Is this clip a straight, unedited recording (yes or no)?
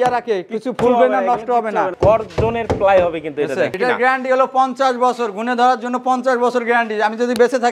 no